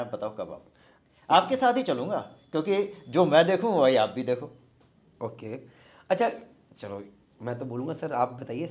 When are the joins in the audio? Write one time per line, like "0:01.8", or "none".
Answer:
none